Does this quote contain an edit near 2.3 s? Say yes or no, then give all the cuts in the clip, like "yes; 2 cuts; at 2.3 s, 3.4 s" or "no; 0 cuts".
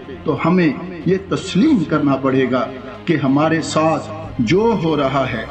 no; 0 cuts